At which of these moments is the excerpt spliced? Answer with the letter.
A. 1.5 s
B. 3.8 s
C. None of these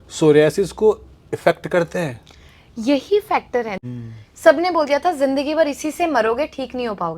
B